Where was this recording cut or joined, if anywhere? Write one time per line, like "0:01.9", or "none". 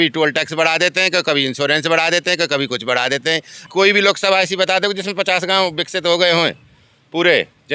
0:03.6